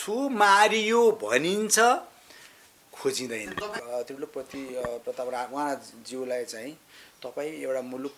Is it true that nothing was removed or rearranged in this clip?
no; 1 cut; at 3.8 s

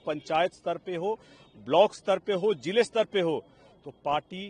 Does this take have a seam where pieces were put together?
no; 0 cuts

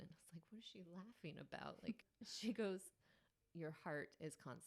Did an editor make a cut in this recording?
yes; 2 cuts; at 2.0 s, 3.4 s

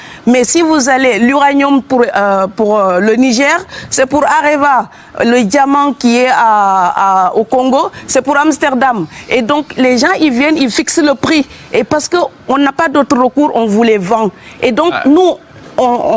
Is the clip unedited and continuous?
yes; 0 cuts

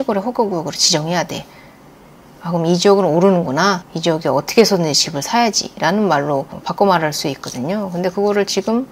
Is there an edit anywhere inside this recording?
no; 0 cuts

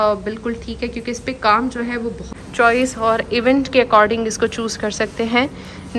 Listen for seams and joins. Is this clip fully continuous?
no; 1 cut; at 2.4 s

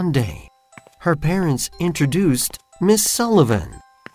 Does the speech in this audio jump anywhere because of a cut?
no; 0 cuts

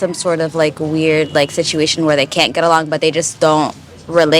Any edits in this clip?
no; 0 cuts

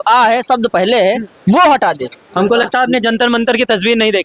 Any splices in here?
no; 0 cuts

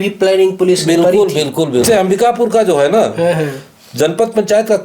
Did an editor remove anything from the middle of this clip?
yes; 1 cut; at 1.8 s

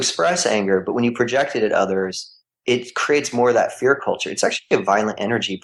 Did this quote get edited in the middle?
no; 0 cuts

